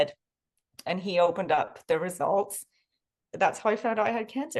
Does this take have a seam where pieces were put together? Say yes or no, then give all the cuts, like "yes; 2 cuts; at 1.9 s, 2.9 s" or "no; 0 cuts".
no; 0 cuts